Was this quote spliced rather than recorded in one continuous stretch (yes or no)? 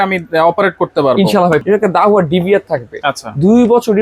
yes